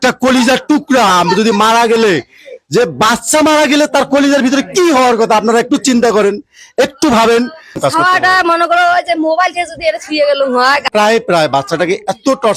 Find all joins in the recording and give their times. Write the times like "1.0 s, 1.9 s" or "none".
7.8 s, 10.9 s